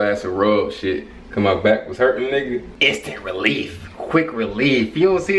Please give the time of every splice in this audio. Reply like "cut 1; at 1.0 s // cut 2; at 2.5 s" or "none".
cut 1; at 2.8 s